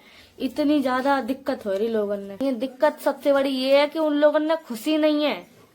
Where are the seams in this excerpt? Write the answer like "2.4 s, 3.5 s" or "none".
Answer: 2.4 s